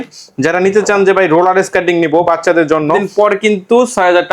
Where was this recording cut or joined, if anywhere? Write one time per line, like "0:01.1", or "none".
0:03.0